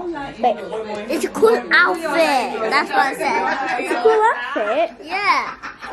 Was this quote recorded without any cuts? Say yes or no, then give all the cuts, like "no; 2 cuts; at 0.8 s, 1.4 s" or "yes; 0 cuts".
yes; 0 cuts